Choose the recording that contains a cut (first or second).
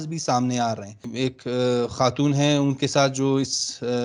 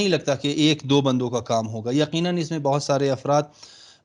first